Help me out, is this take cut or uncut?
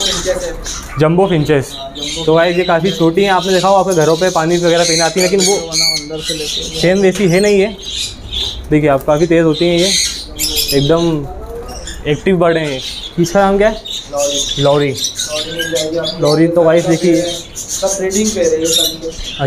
cut